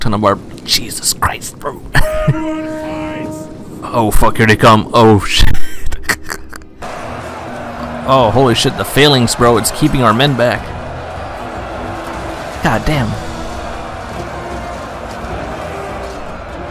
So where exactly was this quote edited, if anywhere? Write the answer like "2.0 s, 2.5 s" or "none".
6.8 s